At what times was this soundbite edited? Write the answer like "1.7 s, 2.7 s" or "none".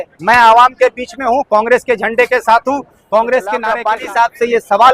3.6 s